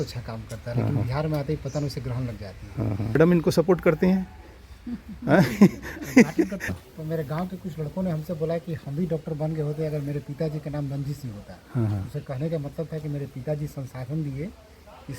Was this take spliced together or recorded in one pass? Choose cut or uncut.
cut